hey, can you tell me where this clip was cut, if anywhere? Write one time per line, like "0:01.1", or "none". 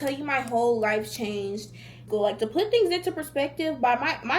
0:02.0